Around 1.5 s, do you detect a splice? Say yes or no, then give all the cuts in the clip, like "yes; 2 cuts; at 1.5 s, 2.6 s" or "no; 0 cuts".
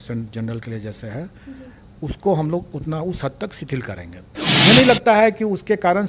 no; 1 cut; at 4.5 s